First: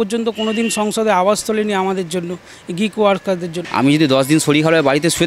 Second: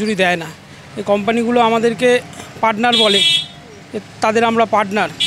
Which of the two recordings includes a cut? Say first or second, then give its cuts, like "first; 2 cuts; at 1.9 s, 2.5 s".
first; 1 cut; at 3.6 s